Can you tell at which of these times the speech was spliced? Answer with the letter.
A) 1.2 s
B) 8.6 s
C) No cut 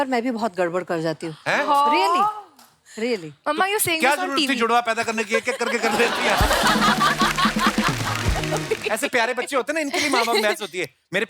B